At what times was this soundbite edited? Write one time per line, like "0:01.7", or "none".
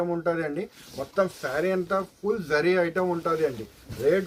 none